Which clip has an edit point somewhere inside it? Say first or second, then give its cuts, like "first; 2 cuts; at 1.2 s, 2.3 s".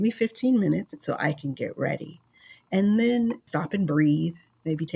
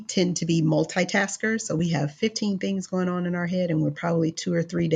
first; 2 cuts; at 1.0 s, 3.5 s